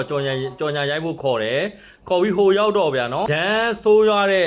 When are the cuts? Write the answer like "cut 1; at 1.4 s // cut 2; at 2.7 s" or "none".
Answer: cut 1; at 3.4 s

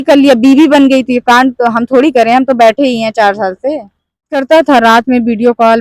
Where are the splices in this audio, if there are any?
cut 1; at 4.4 s

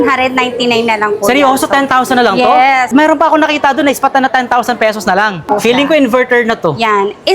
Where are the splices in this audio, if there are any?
cut 1; at 2.9 s // cut 2; at 5.4 s

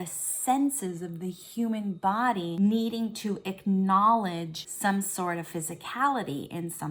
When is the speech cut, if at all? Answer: cut 1; at 2.5 s // cut 2; at 4.6 s

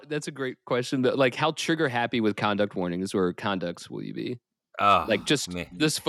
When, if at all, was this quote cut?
none

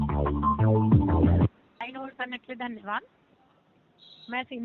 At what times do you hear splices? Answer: cut 1; at 1.8 s

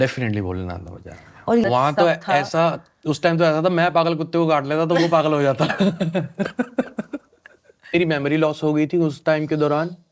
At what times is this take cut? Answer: cut 1; at 1.6 s // cut 2; at 7.9 s

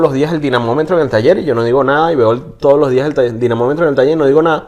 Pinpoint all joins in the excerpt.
none

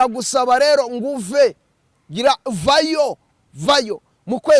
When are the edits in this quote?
none

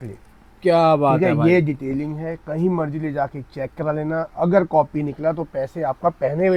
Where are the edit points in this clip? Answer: none

